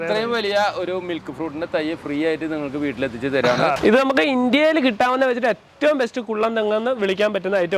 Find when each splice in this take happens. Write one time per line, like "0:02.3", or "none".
0:03.8